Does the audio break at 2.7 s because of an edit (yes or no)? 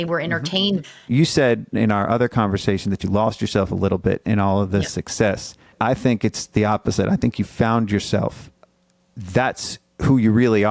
no